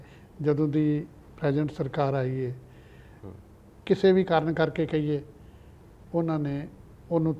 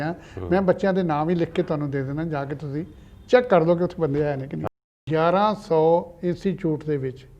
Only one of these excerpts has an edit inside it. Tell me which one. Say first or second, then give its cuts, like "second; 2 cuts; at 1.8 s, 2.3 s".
second; 1 cut; at 4.6 s